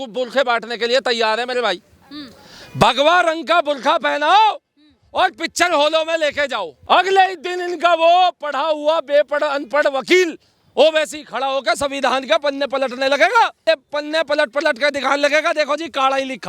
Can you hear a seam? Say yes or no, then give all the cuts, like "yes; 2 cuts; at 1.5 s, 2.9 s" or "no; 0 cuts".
yes; 2 cuts; at 6.7 s, 13.6 s